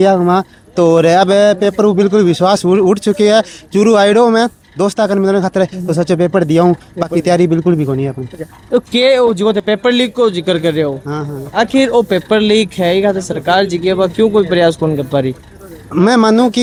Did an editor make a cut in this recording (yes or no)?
no